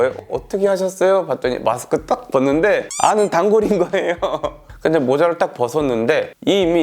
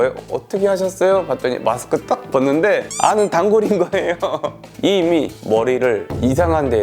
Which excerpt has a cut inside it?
second; 1 cut; at 4.7 s

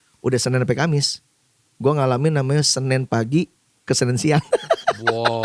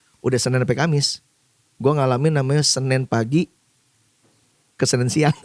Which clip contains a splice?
first; 1 cut; at 3.7 s

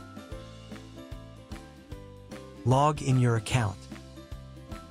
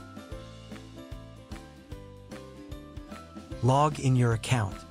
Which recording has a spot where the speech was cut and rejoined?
first; 2 cuts; at 2.6 s, 3.7 s

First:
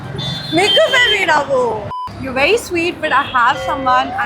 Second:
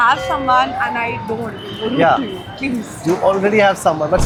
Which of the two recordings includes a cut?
first; 1 cut; at 1.9 s

